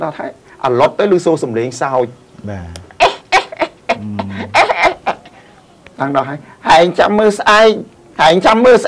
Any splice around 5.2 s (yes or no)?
no